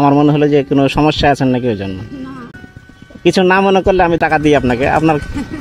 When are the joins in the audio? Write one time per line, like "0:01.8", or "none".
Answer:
0:02.5
0:04.2